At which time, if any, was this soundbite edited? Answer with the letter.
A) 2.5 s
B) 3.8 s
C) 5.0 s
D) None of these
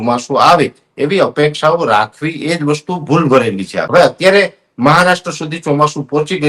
B